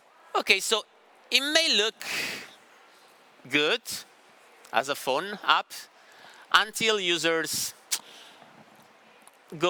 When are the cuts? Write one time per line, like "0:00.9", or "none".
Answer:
none